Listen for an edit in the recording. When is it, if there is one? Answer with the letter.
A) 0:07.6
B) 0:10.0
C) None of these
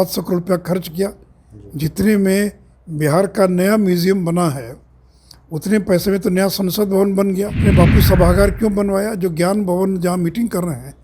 A